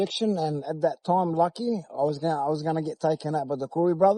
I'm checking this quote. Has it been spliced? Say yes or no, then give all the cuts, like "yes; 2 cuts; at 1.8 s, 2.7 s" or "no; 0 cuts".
no; 0 cuts